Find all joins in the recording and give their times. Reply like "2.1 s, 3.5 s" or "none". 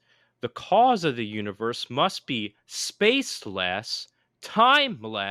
none